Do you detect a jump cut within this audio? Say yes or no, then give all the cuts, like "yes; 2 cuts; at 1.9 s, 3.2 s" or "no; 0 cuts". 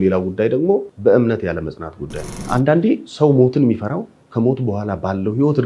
yes; 2 cuts; at 0.9 s, 2.4 s